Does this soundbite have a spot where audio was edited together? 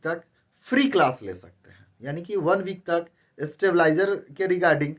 no; 0 cuts

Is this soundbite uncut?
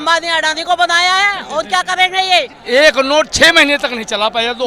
no; 1 cut; at 2.6 s

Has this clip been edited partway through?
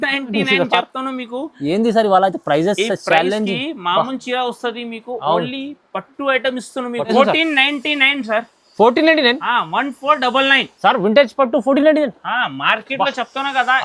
yes; 1 cut; at 7.1 s

